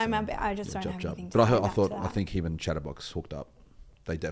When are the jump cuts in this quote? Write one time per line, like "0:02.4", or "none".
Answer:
none